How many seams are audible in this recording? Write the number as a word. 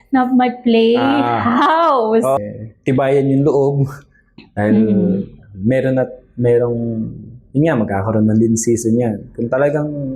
one